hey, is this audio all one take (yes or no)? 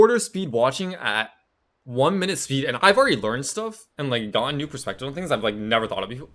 yes